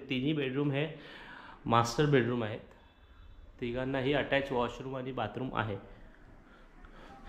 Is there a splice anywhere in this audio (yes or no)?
no